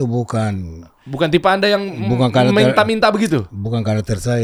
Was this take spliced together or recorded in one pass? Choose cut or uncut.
uncut